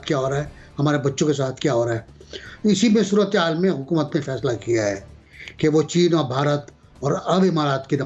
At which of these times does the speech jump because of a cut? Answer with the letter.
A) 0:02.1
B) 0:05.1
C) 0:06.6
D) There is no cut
D